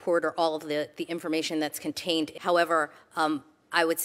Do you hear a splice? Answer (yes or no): yes